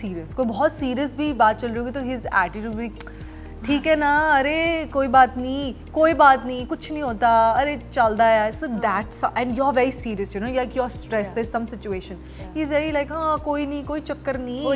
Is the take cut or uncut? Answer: uncut